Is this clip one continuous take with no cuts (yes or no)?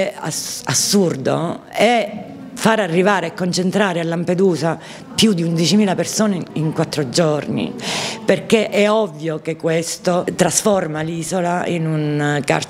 yes